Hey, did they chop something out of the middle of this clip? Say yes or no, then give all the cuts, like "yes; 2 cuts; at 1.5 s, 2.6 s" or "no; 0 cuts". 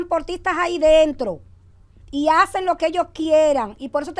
no; 0 cuts